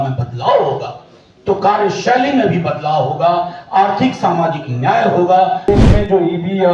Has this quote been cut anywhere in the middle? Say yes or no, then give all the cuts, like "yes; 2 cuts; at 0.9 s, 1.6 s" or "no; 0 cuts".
yes; 1 cut; at 5.7 s